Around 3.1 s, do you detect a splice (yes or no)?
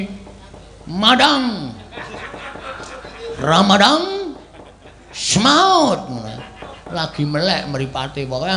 no